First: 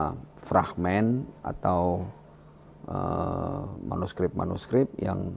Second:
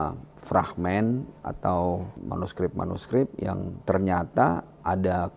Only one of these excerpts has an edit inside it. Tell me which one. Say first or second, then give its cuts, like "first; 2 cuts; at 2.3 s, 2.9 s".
second; 1 cut; at 2.2 s